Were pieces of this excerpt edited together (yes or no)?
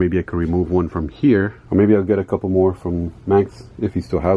yes